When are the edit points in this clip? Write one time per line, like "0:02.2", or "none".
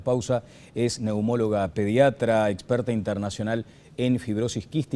none